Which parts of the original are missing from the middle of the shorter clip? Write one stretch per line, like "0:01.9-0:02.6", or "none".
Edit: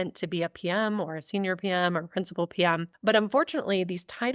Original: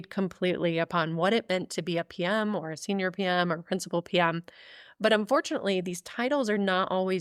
0:04.5-0:04.9